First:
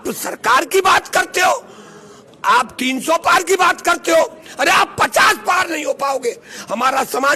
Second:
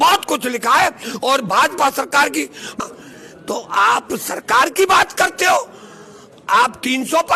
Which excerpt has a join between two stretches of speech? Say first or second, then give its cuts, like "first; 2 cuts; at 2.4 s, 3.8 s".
second; 1 cut; at 2.7 s